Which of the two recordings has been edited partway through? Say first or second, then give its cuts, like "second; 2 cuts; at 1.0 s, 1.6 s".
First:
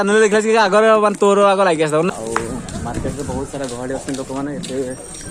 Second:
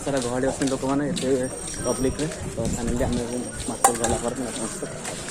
first; 1 cut; at 2.1 s